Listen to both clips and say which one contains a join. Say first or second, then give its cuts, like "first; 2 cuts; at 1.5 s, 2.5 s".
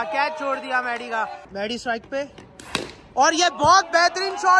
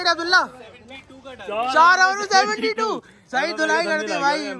first; 1 cut; at 1.4 s